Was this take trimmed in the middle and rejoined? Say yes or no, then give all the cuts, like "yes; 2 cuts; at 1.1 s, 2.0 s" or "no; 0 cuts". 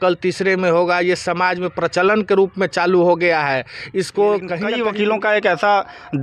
yes; 1 cut; at 4.7 s